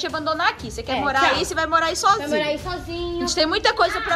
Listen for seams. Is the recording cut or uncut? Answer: uncut